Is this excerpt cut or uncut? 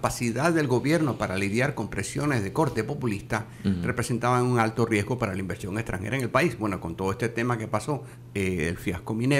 cut